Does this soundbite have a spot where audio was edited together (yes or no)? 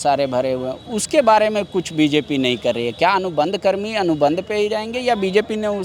no